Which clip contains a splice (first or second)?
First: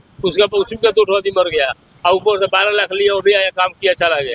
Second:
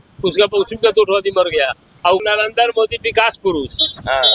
second